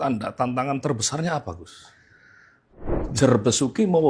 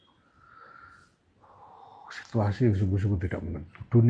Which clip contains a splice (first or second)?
first